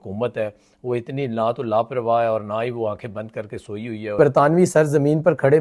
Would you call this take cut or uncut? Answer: cut